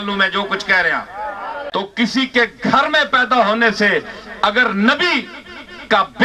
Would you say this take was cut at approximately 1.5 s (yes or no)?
yes